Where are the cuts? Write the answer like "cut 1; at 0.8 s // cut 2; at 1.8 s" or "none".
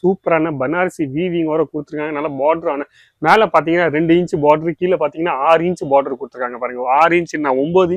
none